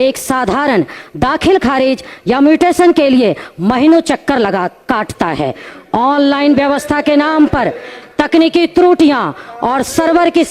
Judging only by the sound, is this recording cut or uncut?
uncut